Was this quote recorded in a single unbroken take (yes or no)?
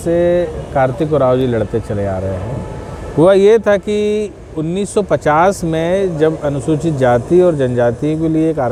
yes